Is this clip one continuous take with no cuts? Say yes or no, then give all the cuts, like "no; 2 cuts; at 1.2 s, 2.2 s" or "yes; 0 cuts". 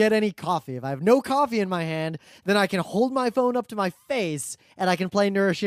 yes; 0 cuts